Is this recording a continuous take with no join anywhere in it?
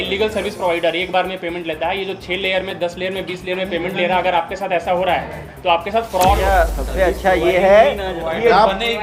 no; 1 cut; at 6.5 s

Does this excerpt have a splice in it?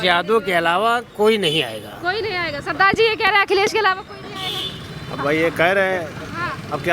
no; 0 cuts

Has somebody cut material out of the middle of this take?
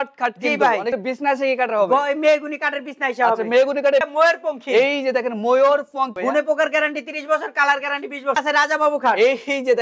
yes; 4 cuts; at 1.0 s, 4.1 s, 6.1 s, 8.4 s

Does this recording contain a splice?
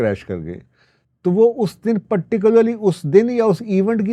no; 0 cuts

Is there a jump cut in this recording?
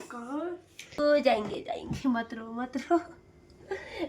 yes; 1 cut; at 0.9 s

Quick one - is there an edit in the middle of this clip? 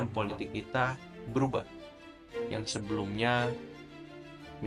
no; 0 cuts

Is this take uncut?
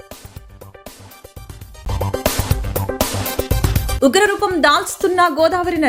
yes; 0 cuts

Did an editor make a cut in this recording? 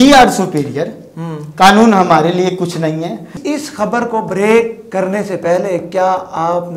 yes; 1 cut; at 3.4 s

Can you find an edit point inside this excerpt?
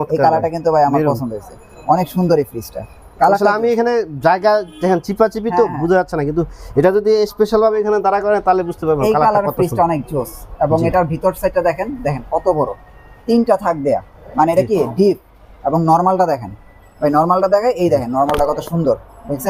no; 0 cuts

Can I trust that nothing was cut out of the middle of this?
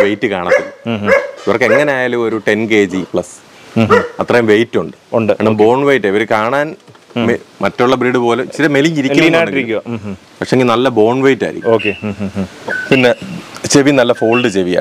yes; 0 cuts

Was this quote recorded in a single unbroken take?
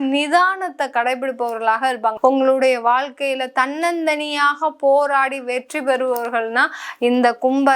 no; 1 cut; at 2.2 s

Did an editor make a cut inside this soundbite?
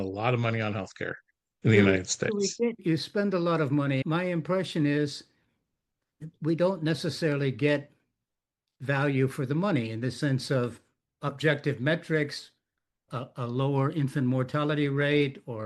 no; 0 cuts

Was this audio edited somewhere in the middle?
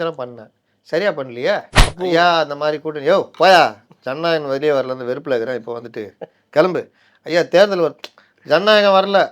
yes; 1 cut; at 1.8 s

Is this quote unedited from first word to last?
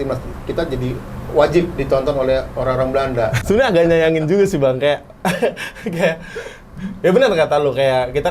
no; 1 cut; at 3.4 s

